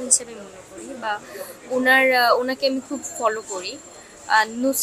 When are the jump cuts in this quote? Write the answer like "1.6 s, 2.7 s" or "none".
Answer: none